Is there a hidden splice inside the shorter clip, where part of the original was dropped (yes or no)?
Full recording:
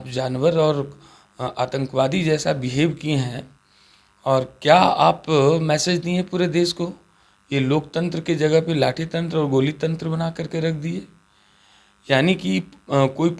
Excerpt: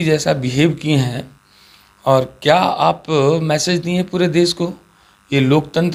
no